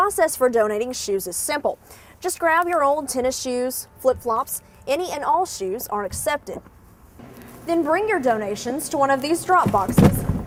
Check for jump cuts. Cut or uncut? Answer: uncut